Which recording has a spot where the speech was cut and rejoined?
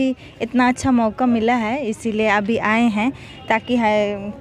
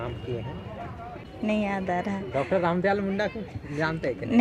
second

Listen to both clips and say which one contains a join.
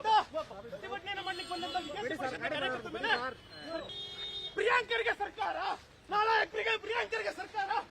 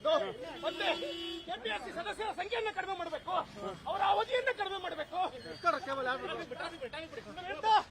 first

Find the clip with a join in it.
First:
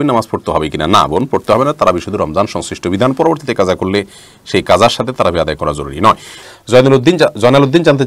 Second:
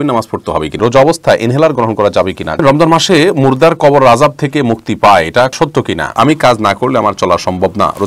second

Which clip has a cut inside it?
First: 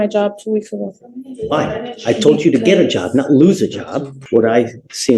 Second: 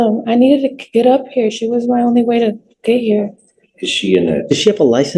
first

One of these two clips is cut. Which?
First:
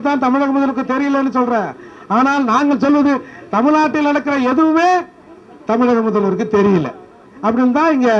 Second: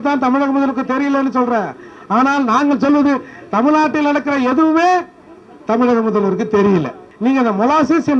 second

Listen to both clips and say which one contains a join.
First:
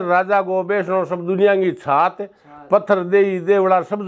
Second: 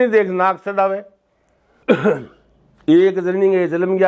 second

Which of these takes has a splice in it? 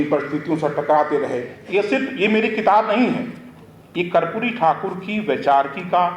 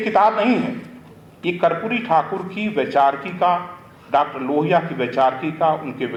first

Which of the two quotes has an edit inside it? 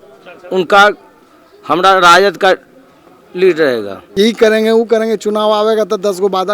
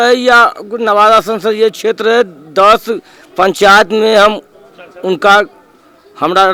first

